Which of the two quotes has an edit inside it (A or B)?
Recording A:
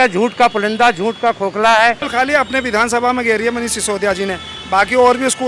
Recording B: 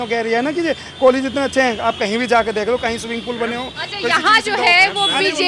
A